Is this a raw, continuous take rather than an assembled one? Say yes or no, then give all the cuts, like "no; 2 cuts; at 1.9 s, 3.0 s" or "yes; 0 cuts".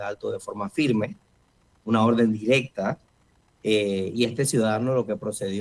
yes; 0 cuts